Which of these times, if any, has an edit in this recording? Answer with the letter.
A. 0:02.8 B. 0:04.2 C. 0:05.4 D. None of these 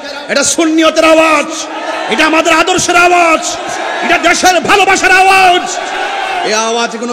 D